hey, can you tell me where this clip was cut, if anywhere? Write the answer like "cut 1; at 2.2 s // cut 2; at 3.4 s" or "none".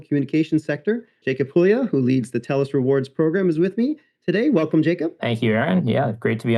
cut 1; at 1.3 s // cut 2; at 5.2 s